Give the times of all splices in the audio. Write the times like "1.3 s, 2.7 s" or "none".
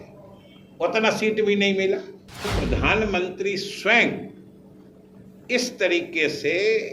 2.5 s